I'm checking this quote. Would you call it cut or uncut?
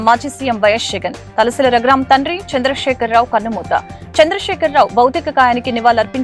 uncut